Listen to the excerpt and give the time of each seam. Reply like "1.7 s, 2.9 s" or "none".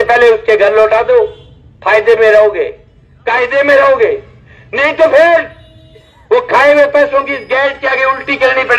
none